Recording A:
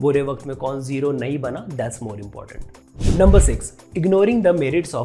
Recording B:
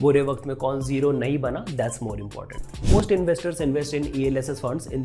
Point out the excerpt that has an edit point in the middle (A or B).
B